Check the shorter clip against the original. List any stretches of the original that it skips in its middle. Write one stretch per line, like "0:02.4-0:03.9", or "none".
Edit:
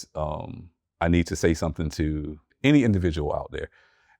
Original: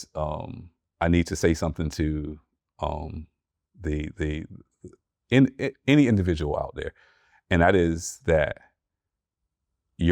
0:02.5-0:05.8